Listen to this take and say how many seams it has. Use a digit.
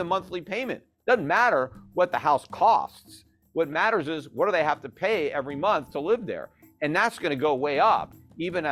0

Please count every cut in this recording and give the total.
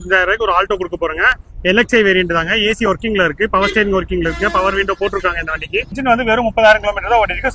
1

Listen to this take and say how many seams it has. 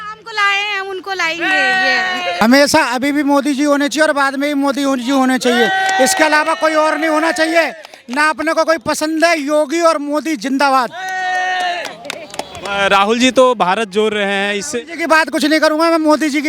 1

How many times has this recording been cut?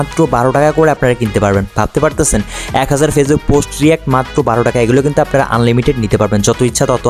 0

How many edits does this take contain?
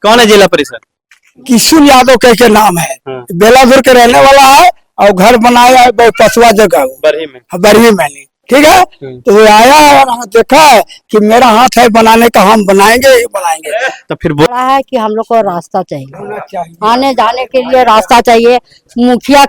1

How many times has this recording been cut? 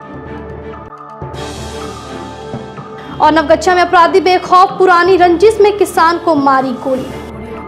1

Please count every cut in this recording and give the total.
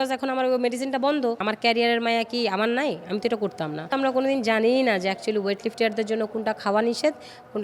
2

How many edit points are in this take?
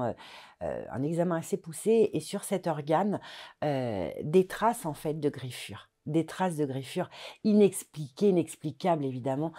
0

